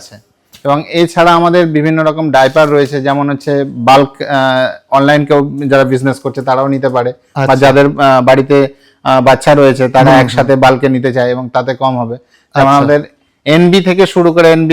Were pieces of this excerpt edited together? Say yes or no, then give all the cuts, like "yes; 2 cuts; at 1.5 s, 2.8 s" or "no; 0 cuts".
no; 0 cuts